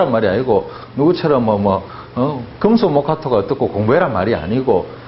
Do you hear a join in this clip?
no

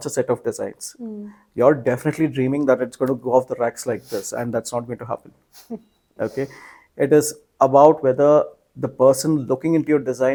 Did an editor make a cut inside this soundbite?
no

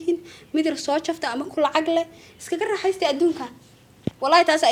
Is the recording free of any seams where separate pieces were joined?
yes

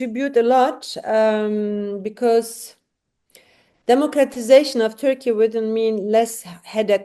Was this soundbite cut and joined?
no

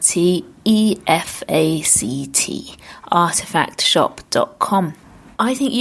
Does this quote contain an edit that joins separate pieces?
no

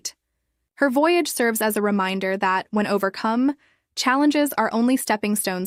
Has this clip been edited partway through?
no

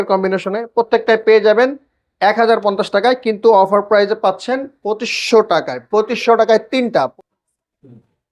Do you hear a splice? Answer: yes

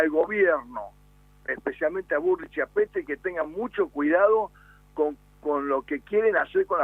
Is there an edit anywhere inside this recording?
yes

